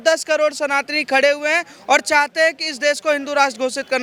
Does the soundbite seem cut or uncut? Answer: uncut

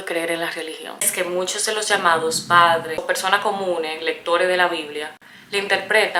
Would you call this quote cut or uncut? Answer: uncut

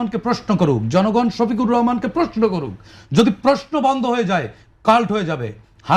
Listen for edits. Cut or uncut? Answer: uncut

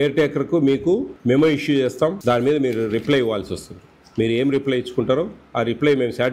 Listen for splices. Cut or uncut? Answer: cut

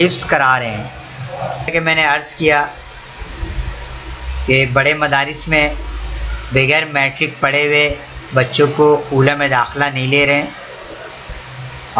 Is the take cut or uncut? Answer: cut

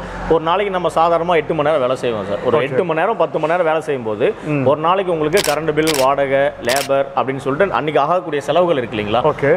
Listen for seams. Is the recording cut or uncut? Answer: uncut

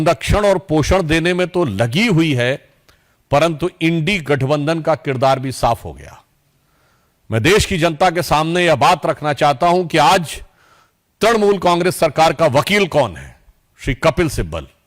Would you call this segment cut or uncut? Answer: uncut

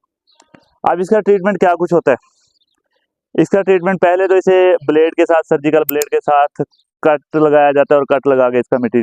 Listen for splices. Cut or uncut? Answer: uncut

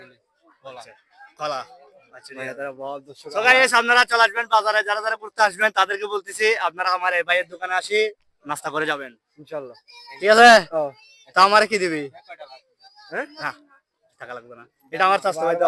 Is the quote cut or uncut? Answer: uncut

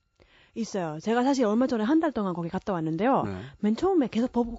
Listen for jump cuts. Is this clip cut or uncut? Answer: uncut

